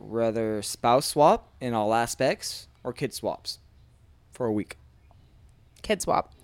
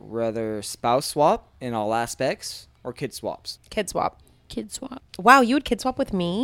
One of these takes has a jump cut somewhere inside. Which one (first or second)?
second